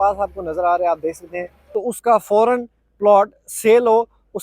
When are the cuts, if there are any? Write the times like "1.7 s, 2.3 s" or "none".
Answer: 1.6 s